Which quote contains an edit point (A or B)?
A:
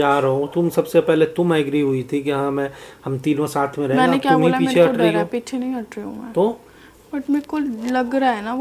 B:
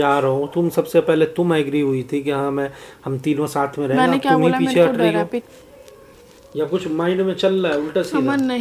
B